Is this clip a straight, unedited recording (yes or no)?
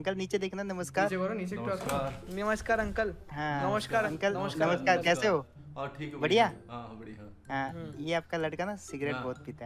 yes